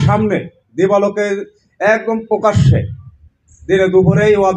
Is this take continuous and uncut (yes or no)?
yes